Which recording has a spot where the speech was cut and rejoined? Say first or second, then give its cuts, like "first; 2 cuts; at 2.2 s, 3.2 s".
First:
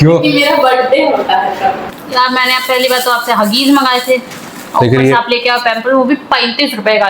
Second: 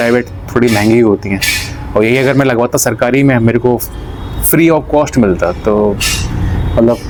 first; 1 cut; at 2.0 s